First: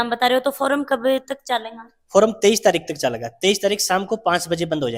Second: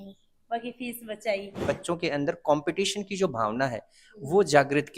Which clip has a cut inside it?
second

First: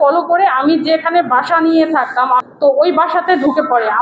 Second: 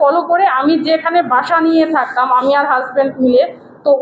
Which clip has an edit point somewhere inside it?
first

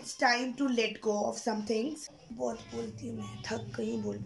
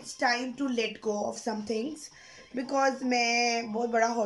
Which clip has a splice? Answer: first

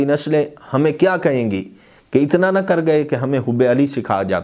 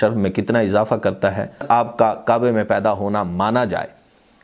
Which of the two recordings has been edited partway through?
second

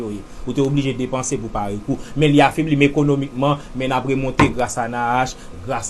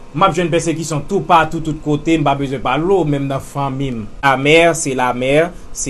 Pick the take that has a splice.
second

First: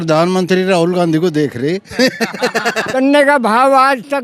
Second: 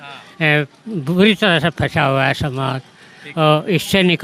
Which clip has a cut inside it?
first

